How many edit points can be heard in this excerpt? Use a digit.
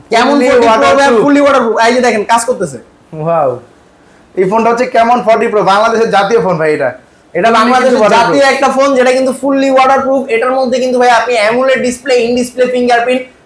0